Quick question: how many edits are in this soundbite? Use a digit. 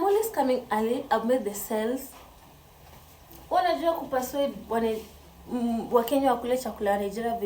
0